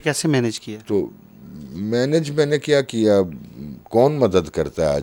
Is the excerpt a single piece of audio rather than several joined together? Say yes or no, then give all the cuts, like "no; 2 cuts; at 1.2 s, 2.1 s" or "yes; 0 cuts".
yes; 0 cuts